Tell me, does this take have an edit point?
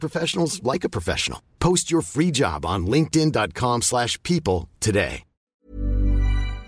yes; 1 cut; at 5.4 s

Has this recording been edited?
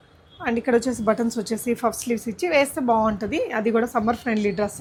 no; 0 cuts

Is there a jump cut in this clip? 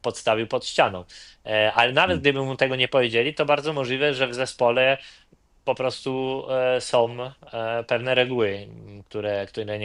no; 0 cuts

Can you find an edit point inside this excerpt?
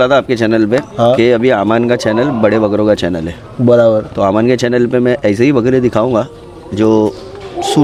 no; 0 cuts

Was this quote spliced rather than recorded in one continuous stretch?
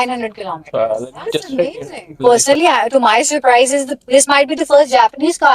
yes; 1 cut; at 2.1 s

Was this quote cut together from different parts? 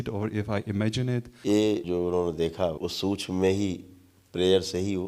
yes; 3 cuts; at 1.3 s, 1.8 s, 2.8 s

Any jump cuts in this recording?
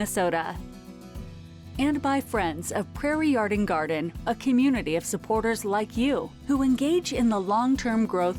no; 0 cuts

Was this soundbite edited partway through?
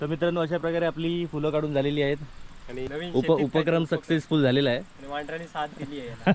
yes; 1 cut; at 3.0 s

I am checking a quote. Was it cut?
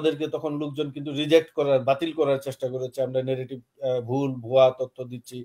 no; 0 cuts

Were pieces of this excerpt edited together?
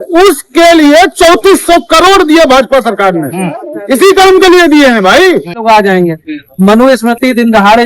yes; 1 cut; at 5.6 s

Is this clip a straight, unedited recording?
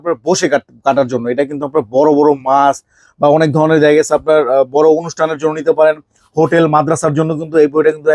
yes; 0 cuts

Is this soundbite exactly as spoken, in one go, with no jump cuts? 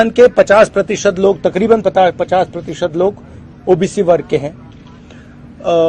yes; 0 cuts

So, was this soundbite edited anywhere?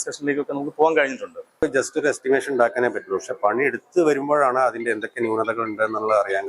yes; 1 cut; at 1.6 s

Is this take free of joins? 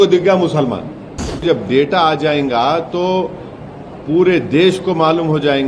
no; 1 cut; at 1.4 s

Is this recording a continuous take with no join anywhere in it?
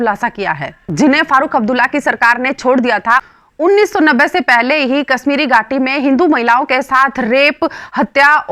no; 1 cut; at 3.2 s

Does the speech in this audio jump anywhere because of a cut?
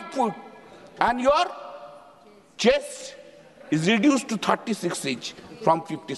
no; 0 cuts

